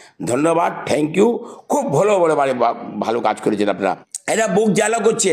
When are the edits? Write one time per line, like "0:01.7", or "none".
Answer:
0:03.8